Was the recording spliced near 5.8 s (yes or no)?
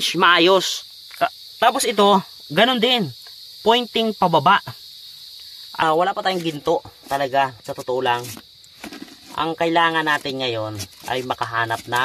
yes